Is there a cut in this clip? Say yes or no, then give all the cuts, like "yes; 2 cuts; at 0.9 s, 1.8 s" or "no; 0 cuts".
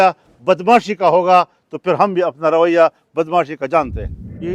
no; 0 cuts